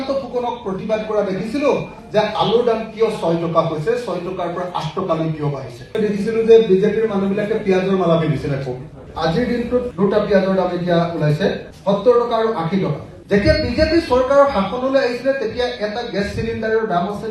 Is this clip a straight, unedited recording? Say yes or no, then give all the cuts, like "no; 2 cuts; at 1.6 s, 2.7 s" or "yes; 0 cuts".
yes; 0 cuts